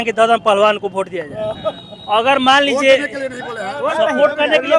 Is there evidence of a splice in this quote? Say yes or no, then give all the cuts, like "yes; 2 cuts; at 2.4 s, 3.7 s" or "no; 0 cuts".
no; 0 cuts